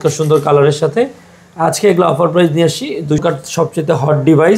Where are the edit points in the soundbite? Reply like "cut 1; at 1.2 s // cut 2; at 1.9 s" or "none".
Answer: cut 1; at 3.2 s